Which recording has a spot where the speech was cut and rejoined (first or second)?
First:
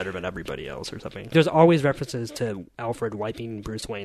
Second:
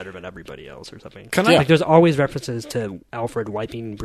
first